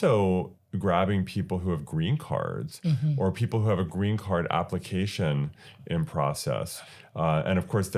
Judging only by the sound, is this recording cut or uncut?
uncut